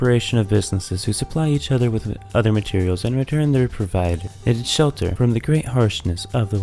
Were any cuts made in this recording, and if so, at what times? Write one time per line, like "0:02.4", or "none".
0:04.3
0:05.1

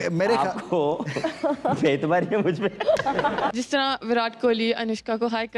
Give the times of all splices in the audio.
0:03.5

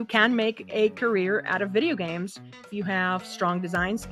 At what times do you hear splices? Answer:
0:02.7

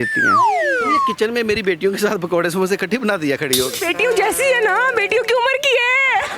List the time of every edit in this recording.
0:01.1

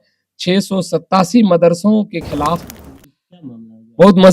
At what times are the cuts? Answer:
0:02.7

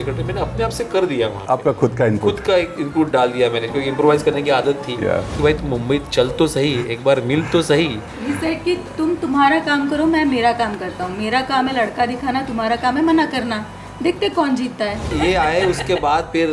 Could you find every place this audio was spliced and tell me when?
0:05.4
0:15.1

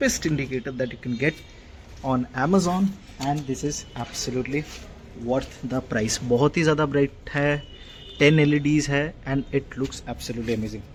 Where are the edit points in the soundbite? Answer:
none

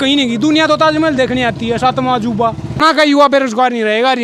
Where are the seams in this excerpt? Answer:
0:03.0

